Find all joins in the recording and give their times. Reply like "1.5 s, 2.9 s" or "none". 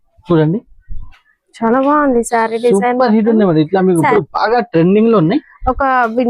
4.1 s